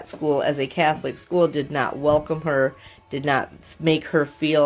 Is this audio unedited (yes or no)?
yes